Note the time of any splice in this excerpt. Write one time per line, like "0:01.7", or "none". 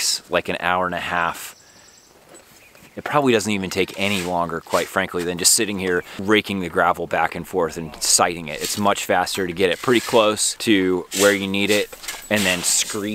0:06.1
0:10.5